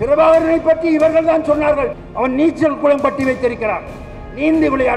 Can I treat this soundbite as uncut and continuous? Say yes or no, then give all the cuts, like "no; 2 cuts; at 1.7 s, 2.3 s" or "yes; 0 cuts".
no; 1 cut; at 1.9 s